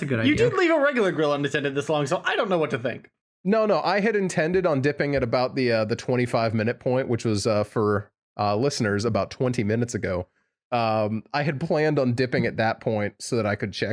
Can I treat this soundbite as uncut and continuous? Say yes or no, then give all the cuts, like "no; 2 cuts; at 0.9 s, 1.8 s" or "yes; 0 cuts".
yes; 0 cuts